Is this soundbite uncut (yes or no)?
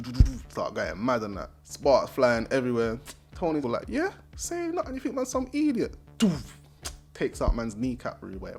yes